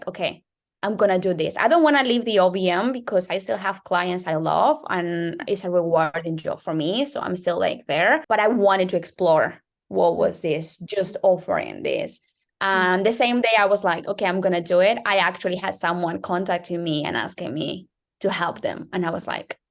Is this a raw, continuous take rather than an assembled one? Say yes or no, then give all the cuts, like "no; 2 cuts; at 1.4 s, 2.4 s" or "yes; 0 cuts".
yes; 0 cuts